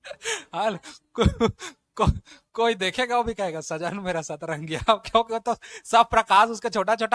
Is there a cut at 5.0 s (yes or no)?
no